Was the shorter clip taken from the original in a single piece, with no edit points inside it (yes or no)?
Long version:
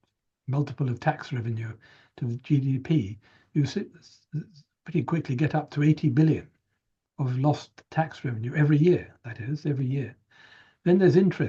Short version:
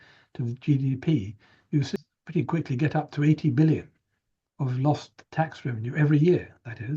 no